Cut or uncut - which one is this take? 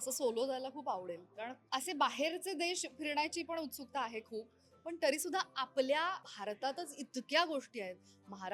cut